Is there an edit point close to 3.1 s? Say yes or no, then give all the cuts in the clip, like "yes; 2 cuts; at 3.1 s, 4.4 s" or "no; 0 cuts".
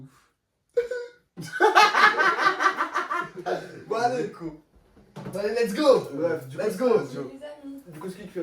no; 0 cuts